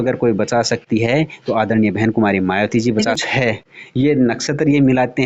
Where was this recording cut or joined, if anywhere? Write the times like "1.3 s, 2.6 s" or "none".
3.2 s